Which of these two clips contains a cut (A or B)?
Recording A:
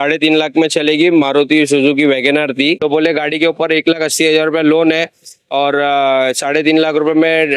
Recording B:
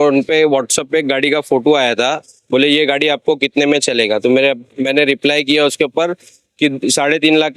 A